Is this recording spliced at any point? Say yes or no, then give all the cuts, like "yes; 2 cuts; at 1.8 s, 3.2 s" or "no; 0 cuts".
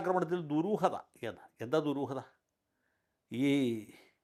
no; 0 cuts